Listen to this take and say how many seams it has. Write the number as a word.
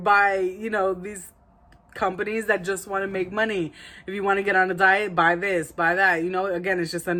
zero